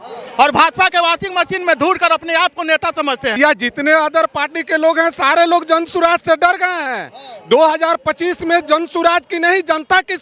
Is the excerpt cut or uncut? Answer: cut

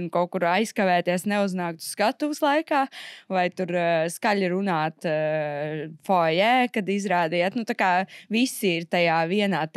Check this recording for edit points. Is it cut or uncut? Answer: uncut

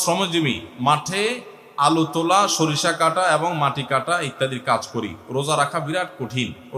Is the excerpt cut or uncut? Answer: uncut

